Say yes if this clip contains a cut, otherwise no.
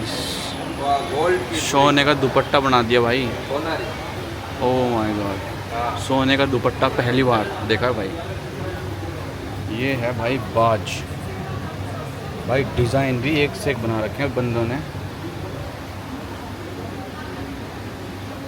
no